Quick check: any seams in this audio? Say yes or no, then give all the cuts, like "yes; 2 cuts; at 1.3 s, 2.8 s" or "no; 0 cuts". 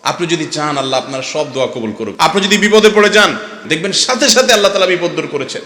yes; 2 cuts; at 2.1 s, 3.7 s